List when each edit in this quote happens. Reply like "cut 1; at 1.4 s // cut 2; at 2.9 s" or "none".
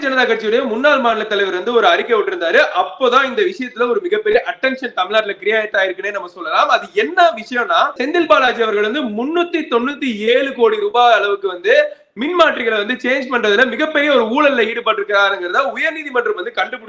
cut 1; at 8.0 s